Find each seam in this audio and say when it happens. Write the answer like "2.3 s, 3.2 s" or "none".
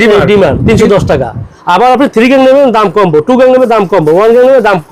none